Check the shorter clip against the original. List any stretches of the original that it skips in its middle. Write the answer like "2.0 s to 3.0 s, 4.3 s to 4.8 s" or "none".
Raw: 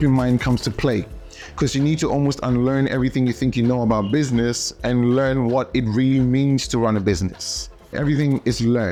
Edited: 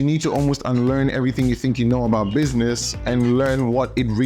none